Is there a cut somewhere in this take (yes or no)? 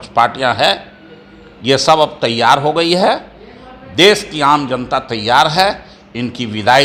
no